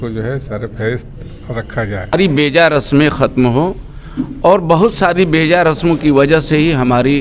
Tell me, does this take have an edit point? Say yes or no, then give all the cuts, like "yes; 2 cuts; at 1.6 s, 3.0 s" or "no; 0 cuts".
yes; 1 cut; at 2.1 s